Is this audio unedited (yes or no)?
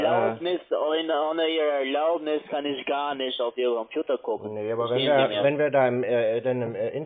yes